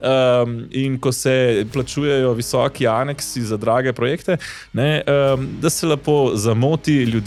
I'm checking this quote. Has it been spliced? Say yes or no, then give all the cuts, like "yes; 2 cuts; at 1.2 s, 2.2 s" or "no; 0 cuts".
no; 0 cuts